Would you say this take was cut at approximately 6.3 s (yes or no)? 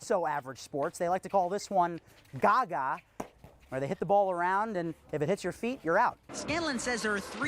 yes